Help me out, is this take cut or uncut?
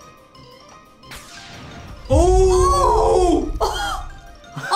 uncut